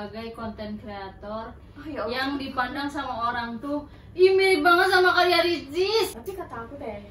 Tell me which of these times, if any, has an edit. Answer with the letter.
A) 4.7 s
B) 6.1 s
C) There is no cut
B